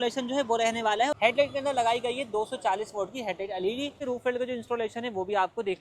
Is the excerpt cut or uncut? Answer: cut